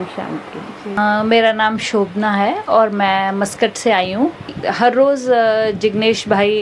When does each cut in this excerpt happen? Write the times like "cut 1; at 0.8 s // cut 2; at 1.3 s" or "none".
cut 1; at 1.0 s // cut 2; at 4.5 s